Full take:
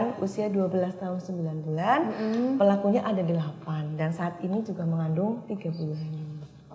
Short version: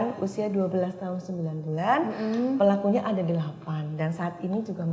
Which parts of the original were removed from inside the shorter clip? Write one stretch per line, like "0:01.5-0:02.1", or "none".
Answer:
none